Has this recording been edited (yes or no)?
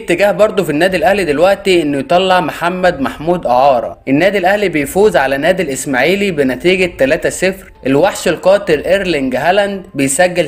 yes